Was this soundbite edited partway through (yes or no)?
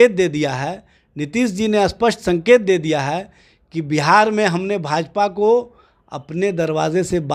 no